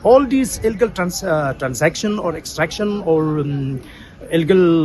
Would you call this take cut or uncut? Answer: uncut